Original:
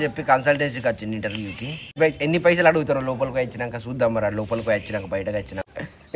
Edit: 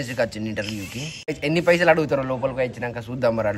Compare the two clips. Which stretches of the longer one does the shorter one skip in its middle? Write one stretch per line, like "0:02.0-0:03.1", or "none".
0:02.0-0:02.1